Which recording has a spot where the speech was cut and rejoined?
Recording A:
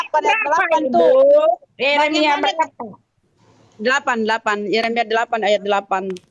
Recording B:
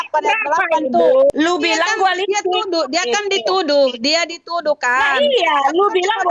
B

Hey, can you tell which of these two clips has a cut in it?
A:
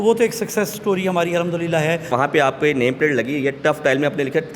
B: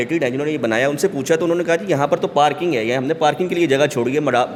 A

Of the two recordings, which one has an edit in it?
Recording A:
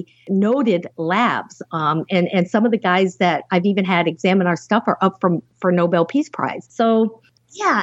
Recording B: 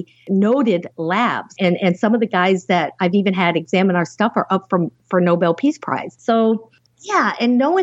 B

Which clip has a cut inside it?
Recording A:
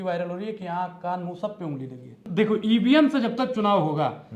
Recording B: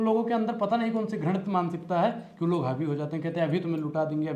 A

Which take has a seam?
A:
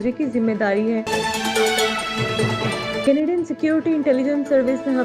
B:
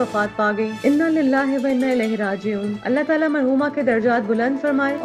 A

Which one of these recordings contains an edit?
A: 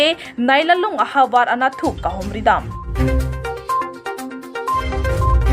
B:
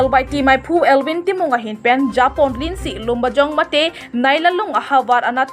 A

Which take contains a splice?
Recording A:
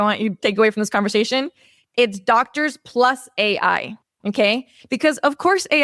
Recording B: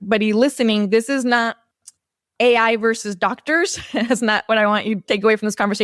B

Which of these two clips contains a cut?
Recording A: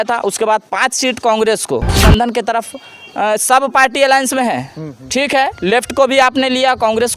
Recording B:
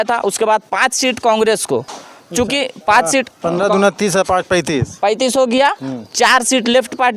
A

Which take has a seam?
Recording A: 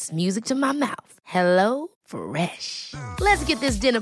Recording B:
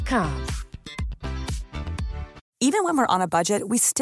B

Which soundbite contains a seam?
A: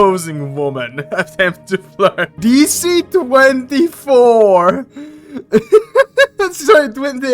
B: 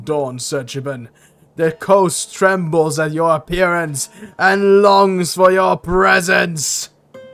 A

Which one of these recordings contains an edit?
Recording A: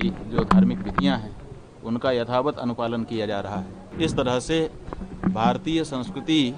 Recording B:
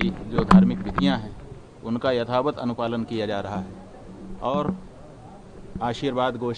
A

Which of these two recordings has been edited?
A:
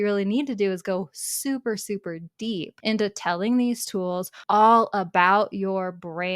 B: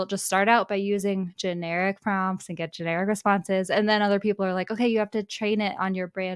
A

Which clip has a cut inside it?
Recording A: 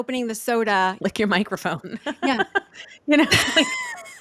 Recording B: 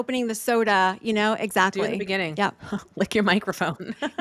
A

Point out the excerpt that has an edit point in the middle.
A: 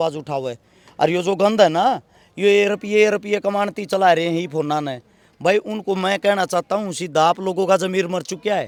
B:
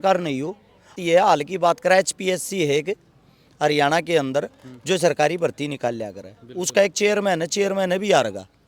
B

